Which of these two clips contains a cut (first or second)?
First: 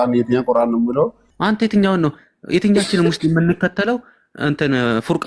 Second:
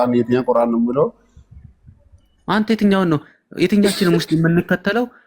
first